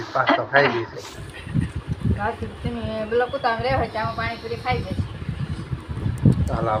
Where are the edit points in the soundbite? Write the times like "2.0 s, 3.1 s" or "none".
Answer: none